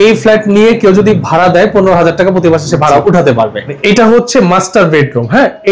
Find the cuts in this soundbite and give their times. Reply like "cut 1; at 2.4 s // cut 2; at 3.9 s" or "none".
cut 1; at 3.8 s